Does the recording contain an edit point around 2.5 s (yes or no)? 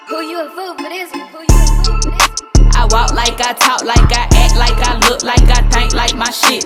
no